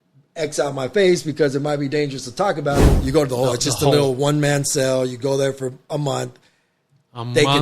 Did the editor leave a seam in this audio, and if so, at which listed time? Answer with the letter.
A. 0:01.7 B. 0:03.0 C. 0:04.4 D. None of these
B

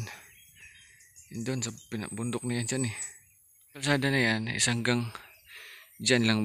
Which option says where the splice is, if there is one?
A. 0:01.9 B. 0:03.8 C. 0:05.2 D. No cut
B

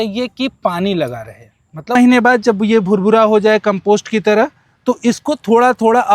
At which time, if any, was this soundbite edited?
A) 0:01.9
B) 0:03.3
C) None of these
A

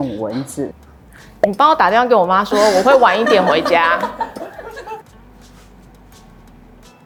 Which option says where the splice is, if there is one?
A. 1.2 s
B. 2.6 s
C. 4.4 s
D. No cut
D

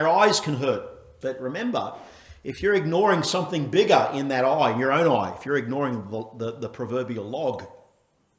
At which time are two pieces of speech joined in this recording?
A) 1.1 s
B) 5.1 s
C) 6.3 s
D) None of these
A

